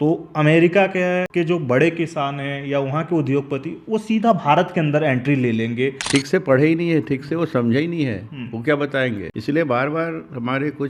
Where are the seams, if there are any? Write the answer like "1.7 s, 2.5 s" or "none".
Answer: 1.3 s, 6.0 s, 9.3 s